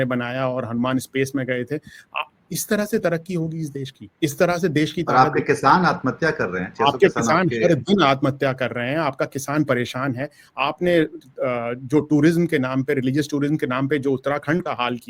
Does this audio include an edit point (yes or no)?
no